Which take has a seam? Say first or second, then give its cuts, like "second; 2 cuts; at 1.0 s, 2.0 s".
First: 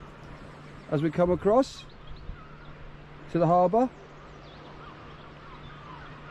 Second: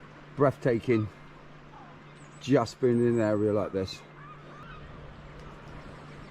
second; 1 cut; at 4.5 s